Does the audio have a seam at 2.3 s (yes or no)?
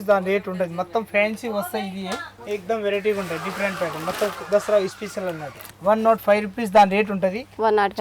yes